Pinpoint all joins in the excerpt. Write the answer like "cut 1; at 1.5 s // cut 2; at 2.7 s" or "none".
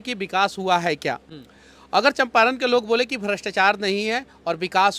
none